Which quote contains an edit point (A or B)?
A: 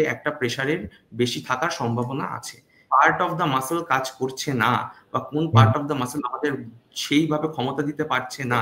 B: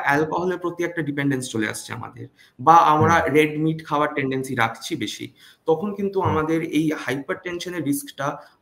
A